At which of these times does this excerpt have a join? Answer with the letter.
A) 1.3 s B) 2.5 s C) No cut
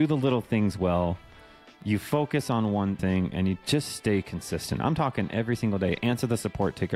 C